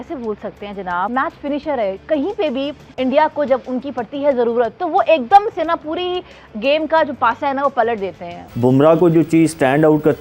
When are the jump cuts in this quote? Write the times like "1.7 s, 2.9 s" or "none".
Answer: 1.1 s, 8.4 s